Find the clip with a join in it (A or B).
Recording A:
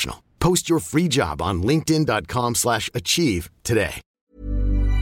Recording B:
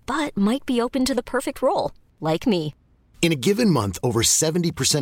A